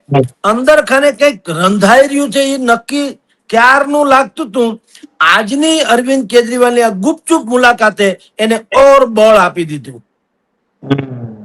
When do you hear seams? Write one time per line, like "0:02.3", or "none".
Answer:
none